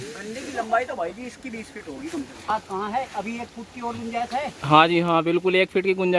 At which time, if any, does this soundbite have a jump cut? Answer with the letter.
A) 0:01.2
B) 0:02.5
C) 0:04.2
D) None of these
B